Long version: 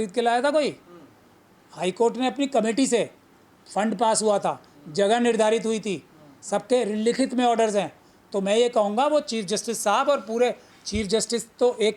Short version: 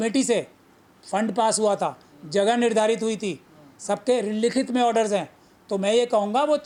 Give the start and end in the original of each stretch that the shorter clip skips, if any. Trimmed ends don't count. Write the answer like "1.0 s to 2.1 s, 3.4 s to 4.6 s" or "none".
none